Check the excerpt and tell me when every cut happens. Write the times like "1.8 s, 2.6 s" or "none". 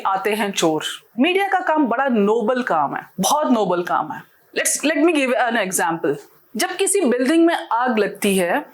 1.1 s